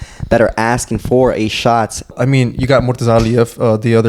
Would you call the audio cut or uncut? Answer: cut